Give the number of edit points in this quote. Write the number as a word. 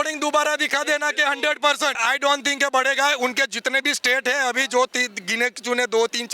one